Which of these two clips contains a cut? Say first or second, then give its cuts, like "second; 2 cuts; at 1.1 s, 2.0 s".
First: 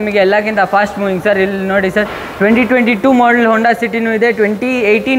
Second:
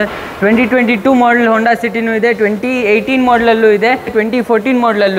second; 1 cut; at 4.2 s